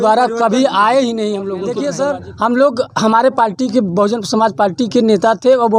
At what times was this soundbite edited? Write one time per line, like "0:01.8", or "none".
0:01.8

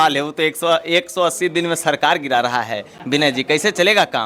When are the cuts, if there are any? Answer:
none

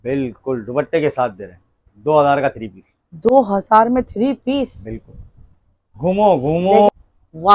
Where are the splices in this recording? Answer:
none

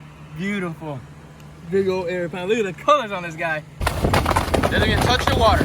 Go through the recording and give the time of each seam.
0:03.8

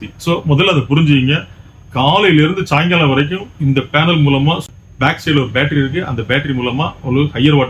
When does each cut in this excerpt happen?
0:04.6

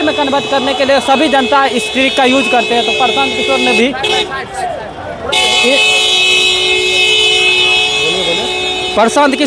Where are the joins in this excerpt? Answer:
none

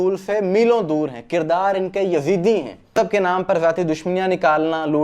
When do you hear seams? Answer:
0:02.9

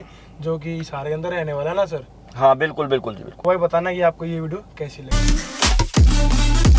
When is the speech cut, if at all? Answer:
none

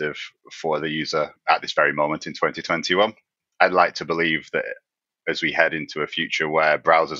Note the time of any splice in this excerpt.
0:01.4
0:03.4

